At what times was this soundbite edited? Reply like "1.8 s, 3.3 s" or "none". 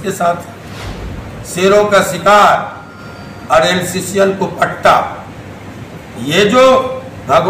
none